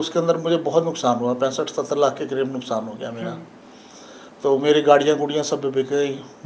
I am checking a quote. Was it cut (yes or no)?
no